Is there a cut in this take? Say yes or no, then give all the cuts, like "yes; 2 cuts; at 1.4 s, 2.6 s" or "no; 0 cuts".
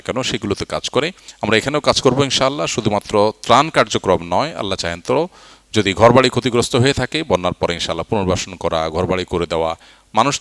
yes; 1 cut; at 1.2 s